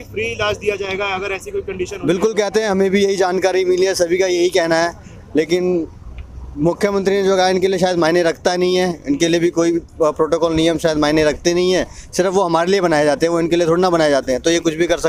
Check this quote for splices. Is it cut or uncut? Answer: uncut